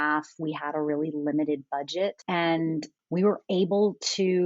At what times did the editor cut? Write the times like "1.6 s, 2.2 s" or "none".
2.2 s, 3.0 s